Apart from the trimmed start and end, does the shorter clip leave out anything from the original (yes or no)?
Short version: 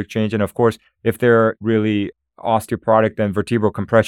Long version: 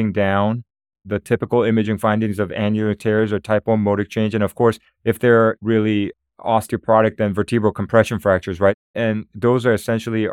no